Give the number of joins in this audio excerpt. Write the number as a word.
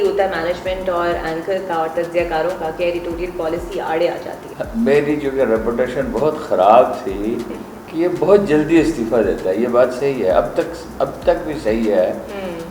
zero